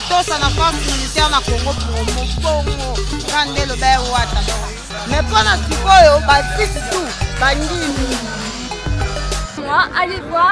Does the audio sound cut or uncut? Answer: cut